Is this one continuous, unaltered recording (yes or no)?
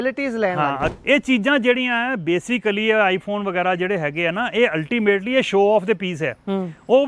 no